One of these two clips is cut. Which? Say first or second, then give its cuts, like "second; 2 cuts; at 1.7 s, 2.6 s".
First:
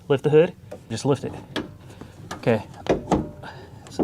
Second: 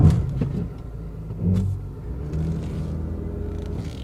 first; 1 cut; at 1.0 s